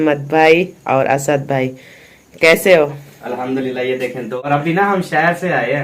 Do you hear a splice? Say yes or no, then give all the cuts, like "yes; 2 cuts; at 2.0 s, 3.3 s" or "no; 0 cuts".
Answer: yes; 1 cut; at 4.3 s